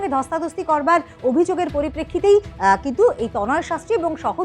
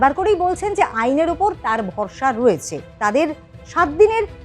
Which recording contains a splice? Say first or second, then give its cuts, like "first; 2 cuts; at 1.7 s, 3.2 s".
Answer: second; 1 cut; at 2.9 s